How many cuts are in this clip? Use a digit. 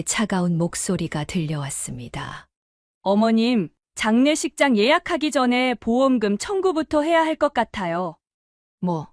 0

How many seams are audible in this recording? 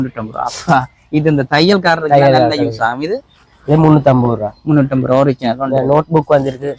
0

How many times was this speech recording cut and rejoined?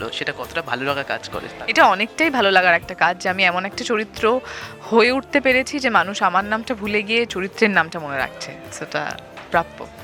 0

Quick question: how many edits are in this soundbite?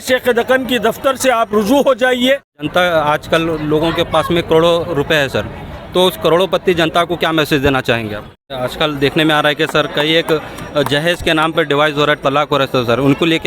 2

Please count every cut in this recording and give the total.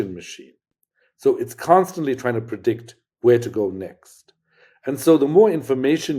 0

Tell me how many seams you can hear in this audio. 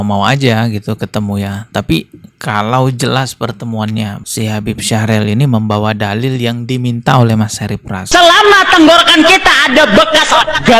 1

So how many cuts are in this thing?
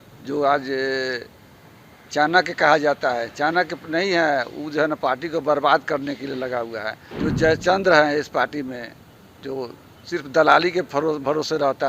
1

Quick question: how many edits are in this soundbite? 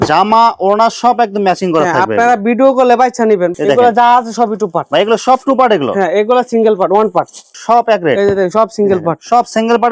2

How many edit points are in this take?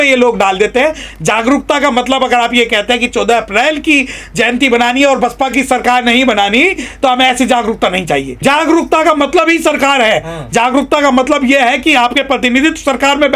2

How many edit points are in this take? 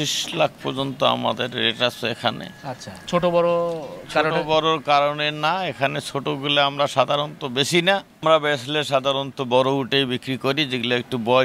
0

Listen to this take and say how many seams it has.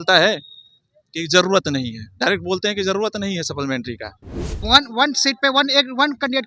1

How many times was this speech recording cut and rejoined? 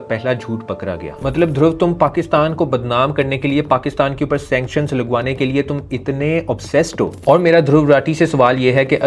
2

